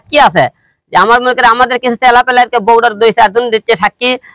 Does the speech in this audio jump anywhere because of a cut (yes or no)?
no